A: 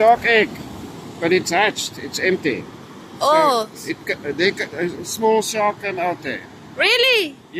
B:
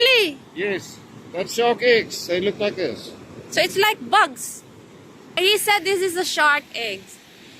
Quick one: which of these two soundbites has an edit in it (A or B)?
B